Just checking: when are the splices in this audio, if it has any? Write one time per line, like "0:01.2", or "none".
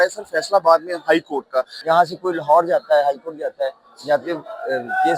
0:01.7